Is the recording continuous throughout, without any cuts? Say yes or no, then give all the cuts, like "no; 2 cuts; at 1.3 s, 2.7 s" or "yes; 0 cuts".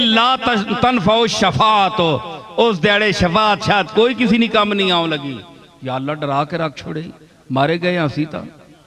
yes; 0 cuts